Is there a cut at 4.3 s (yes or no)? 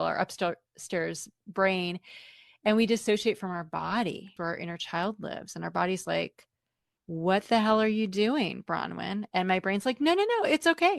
yes